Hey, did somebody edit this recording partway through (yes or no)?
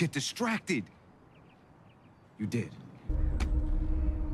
yes